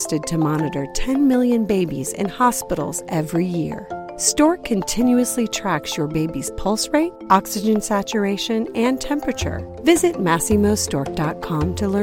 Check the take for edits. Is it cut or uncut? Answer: uncut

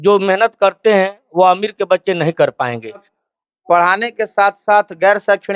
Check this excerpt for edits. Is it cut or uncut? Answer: cut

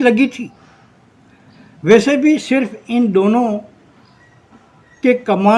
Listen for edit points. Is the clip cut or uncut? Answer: uncut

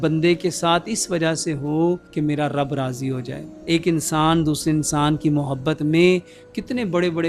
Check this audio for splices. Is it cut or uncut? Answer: cut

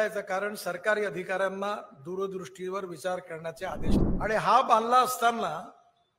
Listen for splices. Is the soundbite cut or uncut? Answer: cut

